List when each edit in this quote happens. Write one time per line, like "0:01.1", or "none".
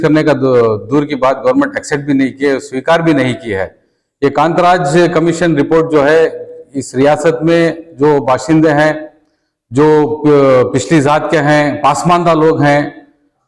none